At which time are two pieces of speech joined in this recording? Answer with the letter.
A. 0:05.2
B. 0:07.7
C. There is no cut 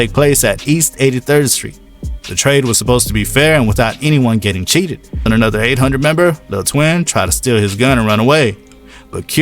A